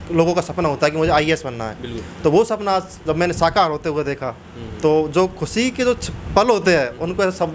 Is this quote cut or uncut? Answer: uncut